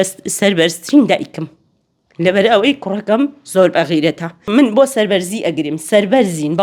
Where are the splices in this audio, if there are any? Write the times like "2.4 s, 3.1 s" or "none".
4.3 s